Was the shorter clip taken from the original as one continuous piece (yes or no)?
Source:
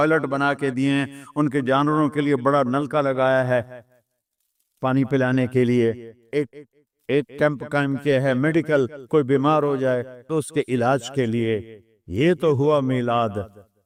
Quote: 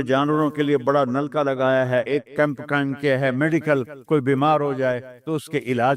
no